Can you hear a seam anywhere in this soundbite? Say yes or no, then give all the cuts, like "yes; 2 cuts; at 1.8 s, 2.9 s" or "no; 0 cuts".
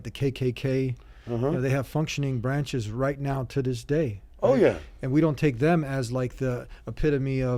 no; 0 cuts